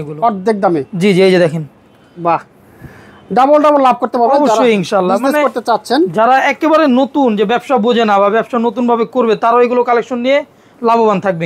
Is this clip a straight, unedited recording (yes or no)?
yes